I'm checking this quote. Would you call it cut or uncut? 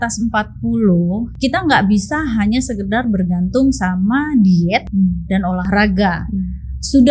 cut